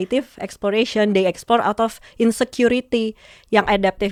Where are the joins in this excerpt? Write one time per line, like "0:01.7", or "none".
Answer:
none